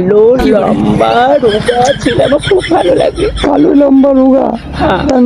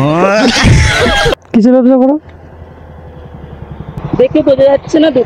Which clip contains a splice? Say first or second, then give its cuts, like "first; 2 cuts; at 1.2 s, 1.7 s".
second; 2 cuts; at 1.3 s, 4.0 s